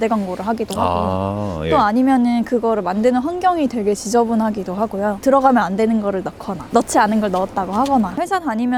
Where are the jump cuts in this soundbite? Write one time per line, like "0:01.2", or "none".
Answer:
none